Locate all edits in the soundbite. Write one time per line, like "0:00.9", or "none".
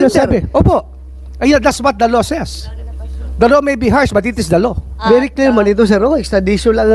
0:05.0